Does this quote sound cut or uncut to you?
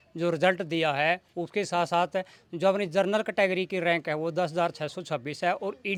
uncut